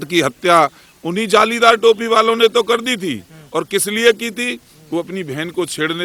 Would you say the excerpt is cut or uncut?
uncut